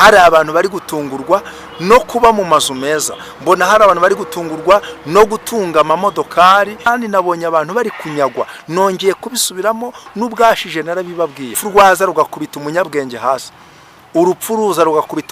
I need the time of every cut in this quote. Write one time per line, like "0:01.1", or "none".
0:06.9
0:11.6